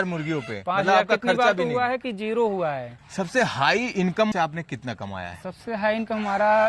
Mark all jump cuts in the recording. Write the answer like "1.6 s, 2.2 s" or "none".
3.0 s, 4.3 s